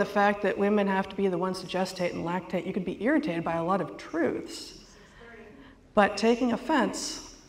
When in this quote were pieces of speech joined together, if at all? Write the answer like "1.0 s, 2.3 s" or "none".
none